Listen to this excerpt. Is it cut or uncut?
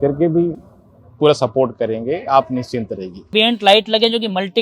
cut